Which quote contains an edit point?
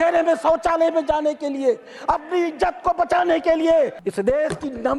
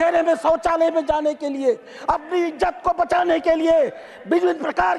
first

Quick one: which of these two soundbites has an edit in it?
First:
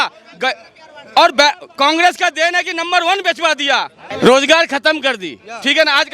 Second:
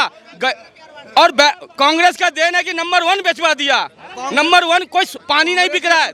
first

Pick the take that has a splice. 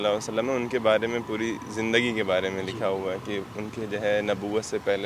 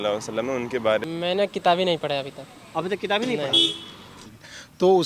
second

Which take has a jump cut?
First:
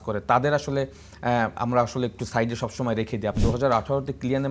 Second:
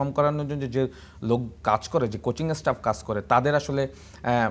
first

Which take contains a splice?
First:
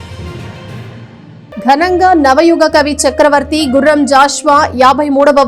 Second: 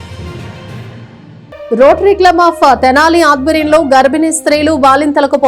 second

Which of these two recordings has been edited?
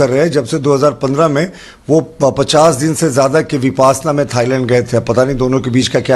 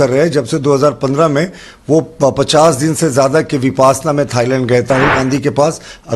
second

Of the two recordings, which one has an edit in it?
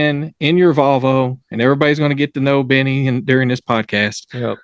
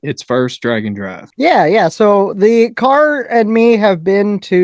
second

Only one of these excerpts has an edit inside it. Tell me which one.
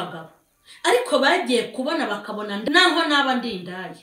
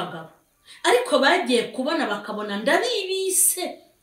first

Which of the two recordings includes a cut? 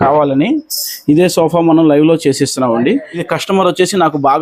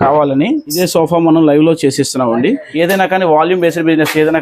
second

